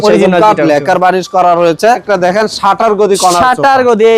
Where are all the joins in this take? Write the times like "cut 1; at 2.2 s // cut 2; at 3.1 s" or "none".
cut 1; at 1.9 s

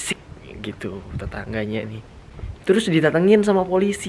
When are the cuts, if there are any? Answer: cut 1; at 2.1 s

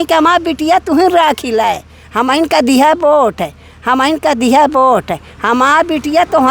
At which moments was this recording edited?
none

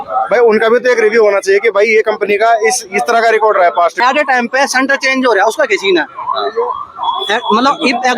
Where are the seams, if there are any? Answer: cut 1; at 3.9 s

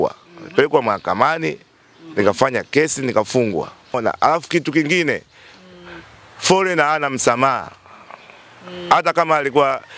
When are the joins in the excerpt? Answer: cut 1; at 4.0 s

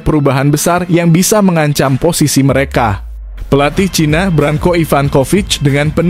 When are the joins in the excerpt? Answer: none

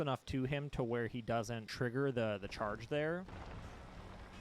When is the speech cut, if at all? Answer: cut 1; at 1.6 s // cut 2; at 3.3 s

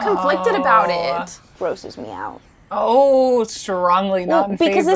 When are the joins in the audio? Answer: cut 1; at 1.4 s

